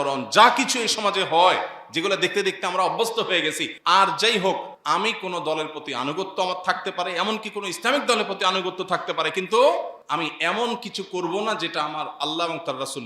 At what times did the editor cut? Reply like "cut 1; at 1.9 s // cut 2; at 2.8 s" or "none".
cut 1; at 3.7 s // cut 2; at 4.7 s // cut 3; at 10.0 s